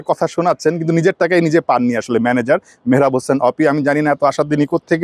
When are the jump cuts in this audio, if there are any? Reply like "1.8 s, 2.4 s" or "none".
none